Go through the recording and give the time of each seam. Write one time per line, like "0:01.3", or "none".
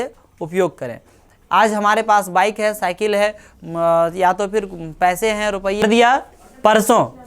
0:05.8